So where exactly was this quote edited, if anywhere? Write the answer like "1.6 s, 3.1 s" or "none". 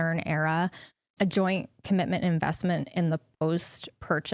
1.1 s